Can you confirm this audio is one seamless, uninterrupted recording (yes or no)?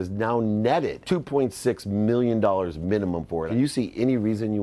no